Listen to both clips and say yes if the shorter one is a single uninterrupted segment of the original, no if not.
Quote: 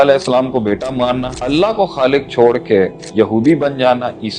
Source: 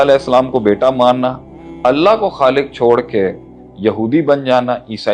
no